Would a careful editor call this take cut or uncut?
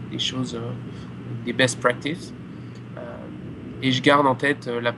uncut